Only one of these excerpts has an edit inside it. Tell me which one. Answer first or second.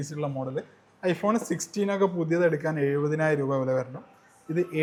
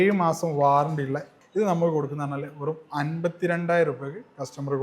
second